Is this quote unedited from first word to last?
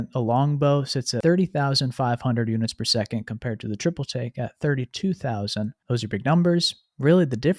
no; 2 cuts; at 1.1 s, 5.8 s

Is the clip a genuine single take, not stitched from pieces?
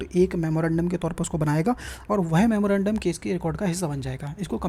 yes; 0 cuts

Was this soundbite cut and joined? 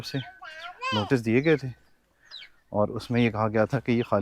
no; 0 cuts

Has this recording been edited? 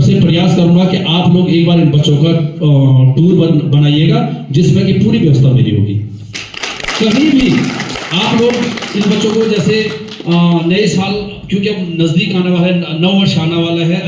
no; 0 cuts

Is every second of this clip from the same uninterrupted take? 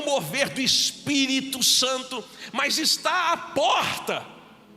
no; 1 cut; at 2.4 s

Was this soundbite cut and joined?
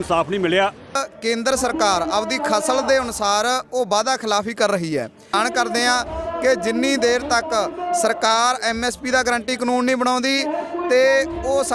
yes; 2 cuts; at 1.1 s, 5.3 s

